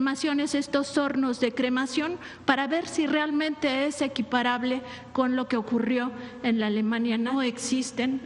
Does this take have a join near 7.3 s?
yes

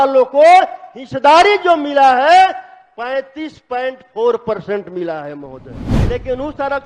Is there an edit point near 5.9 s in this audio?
yes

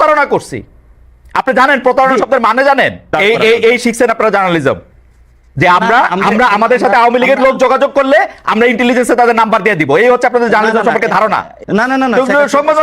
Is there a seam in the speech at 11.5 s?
yes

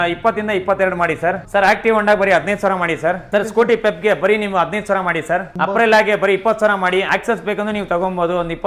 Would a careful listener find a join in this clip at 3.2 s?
yes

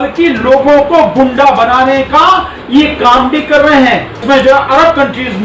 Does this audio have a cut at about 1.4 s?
no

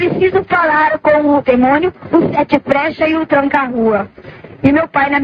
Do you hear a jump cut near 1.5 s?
no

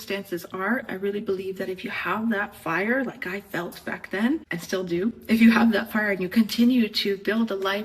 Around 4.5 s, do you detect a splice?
yes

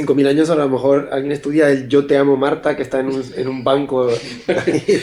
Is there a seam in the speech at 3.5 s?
no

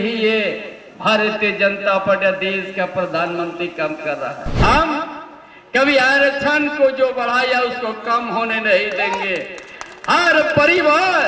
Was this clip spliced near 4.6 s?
yes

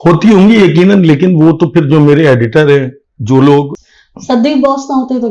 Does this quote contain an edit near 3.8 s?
yes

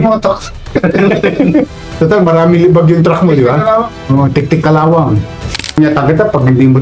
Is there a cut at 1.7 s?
no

